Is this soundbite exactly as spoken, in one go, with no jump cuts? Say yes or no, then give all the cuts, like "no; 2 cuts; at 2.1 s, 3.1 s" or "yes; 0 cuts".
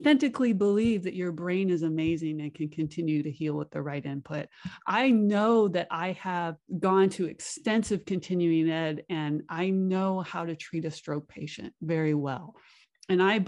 no; 1 cut; at 6.6 s